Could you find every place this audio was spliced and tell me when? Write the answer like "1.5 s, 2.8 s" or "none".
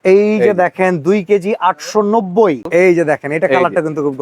2.7 s